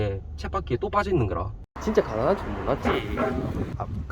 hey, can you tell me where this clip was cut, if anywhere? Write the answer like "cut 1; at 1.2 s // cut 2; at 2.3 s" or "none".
cut 1; at 1.6 s